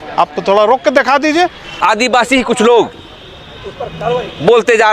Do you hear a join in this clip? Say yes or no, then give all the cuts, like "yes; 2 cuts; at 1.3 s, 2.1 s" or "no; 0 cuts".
yes; 1 cut; at 1.7 s